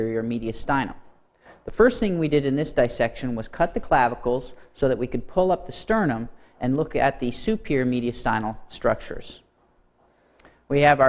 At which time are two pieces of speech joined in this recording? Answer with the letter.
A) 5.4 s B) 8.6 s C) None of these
B